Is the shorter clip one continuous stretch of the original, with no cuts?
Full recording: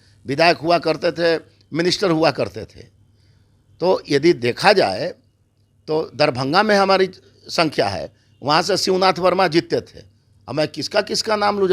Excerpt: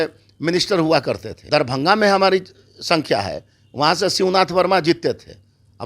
no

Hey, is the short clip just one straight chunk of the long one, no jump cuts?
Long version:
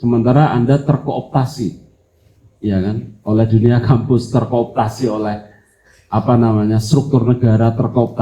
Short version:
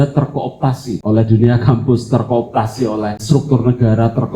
no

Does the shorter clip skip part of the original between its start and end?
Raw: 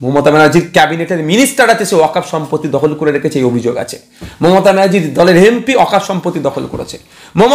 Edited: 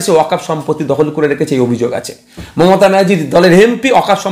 no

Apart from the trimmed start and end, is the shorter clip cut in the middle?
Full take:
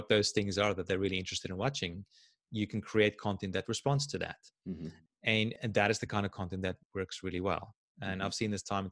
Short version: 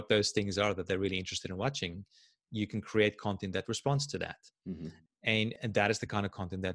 no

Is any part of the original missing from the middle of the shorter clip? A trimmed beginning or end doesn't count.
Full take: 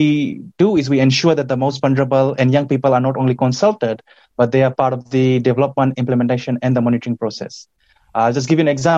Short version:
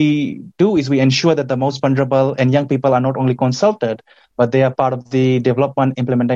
no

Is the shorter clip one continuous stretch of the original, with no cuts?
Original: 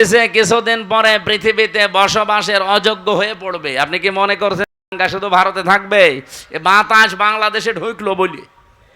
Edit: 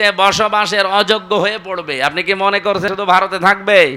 no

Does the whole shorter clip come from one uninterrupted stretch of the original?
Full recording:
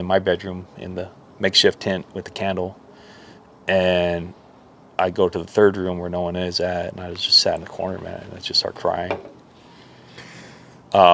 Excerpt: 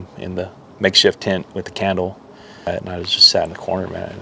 no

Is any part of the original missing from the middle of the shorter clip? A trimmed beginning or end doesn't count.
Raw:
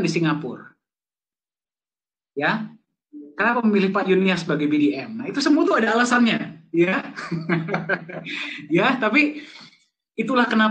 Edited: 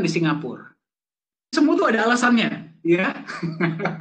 yes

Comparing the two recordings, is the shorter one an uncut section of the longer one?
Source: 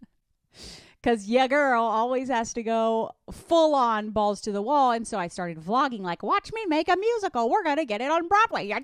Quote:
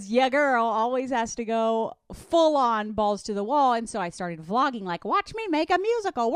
yes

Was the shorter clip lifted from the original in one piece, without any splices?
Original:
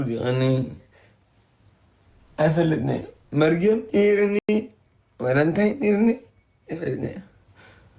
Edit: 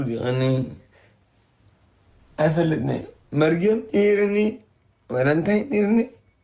no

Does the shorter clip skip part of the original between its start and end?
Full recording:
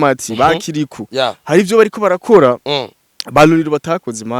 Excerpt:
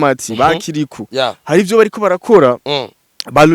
no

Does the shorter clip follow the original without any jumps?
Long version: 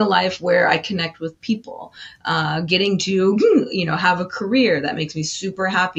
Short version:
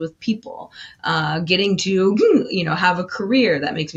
yes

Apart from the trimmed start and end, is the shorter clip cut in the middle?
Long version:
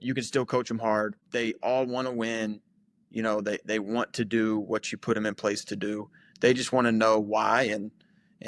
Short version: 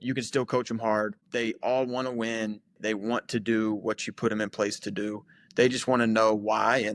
yes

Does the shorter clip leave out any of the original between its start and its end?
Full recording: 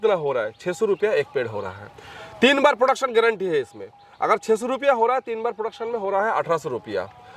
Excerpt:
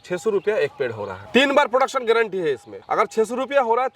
yes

